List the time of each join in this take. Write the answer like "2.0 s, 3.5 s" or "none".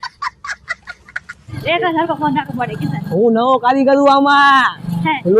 1.5 s